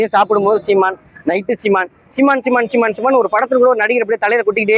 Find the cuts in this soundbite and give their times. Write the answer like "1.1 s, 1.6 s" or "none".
none